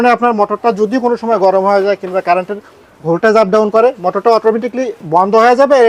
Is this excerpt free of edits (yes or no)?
yes